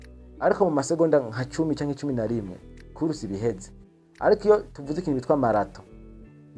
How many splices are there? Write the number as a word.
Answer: one